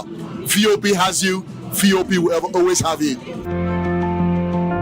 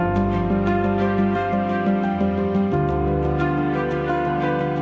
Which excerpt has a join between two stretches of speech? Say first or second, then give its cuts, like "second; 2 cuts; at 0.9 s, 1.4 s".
first; 1 cut; at 3.3 s